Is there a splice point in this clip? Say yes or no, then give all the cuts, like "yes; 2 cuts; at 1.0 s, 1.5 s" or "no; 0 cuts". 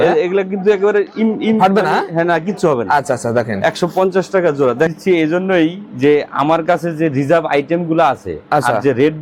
yes; 1 cut; at 4.9 s